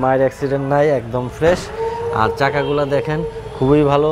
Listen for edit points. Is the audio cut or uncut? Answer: uncut